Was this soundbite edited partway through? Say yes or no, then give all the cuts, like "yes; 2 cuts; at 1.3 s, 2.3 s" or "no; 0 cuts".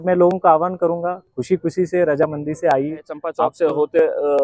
yes; 1 cut; at 3.2 s